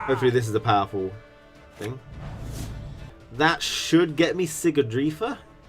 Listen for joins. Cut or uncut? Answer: cut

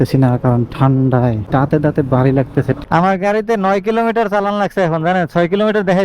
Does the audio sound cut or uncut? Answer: cut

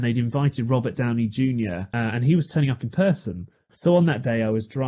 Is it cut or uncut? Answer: cut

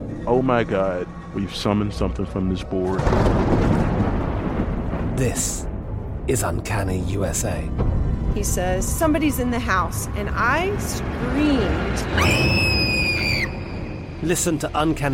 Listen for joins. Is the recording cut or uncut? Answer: uncut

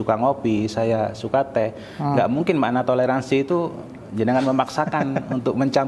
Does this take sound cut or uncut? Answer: uncut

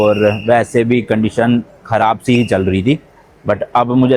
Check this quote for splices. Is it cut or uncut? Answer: uncut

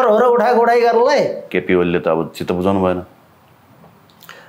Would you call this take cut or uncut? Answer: cut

